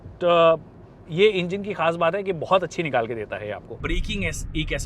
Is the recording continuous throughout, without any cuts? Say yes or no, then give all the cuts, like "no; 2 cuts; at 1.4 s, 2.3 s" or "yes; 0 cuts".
no; 1 cut; at 3.8 s